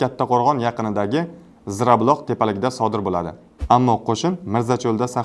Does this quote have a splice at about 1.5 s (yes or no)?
no